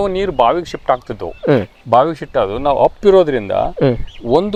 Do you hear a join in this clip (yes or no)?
no